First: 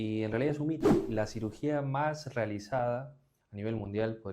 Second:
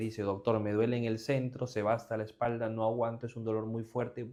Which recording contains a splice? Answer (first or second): first